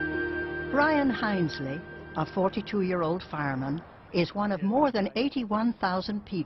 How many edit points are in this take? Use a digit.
1